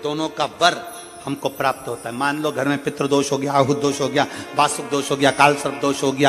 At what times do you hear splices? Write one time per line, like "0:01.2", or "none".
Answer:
none